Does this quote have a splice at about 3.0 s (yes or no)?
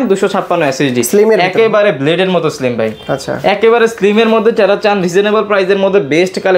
no